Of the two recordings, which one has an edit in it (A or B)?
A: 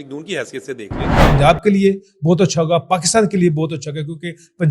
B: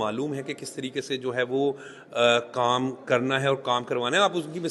A